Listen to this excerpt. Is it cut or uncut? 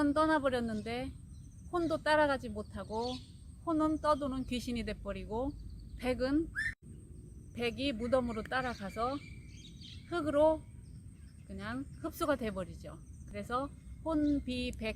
cut